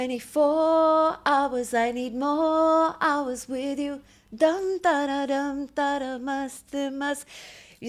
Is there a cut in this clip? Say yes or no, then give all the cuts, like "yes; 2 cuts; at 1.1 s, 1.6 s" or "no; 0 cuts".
no; 0 cuts